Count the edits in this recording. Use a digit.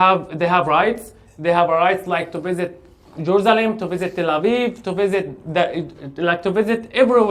0